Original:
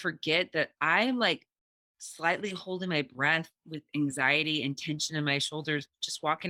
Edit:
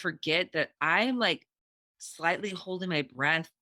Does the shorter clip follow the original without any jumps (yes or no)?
yes